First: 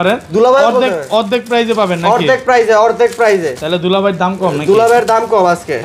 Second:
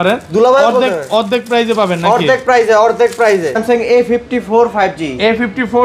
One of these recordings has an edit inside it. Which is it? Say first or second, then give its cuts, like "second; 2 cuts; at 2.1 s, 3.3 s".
second; 1 cut; at 3.6 s